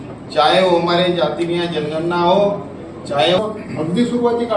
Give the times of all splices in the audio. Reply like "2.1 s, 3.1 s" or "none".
3.4 s